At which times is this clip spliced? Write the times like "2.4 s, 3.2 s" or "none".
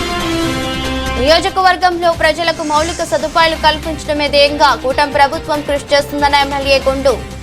1.1 s